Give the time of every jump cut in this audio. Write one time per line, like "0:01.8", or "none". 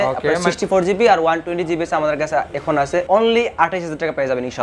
0:03.1